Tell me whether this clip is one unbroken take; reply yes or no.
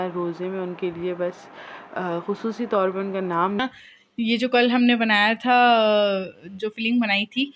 no